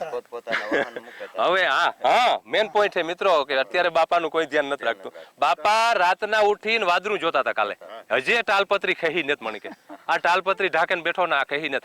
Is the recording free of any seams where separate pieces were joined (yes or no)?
yes